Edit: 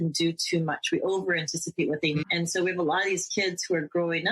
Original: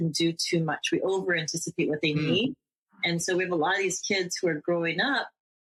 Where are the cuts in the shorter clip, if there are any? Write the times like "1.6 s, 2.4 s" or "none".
2.2 s